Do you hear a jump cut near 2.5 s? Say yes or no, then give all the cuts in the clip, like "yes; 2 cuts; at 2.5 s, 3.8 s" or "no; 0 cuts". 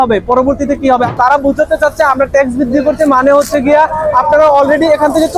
no; 1 cut; at 1.1 s